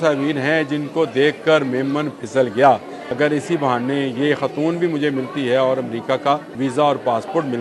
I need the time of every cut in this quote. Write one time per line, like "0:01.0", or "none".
0:03.0
0:06.5